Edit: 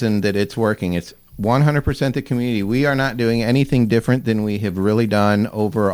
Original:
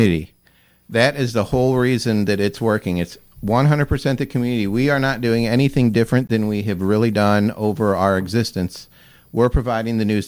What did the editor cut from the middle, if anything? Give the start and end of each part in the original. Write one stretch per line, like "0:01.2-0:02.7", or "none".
none